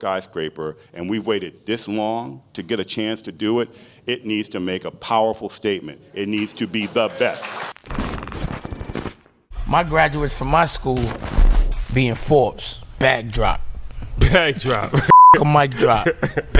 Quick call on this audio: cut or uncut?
cut